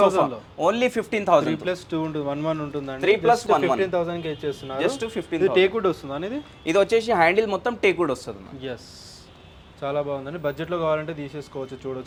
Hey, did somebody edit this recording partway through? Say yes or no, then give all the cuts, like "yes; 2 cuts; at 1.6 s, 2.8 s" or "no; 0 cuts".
no; 0 cuts